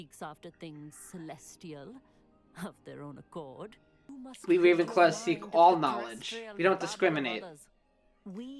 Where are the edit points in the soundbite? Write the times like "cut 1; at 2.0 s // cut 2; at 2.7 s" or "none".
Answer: cut 1; at 4.1 s